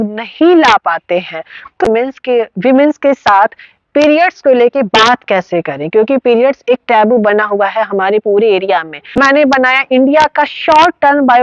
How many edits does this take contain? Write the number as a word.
two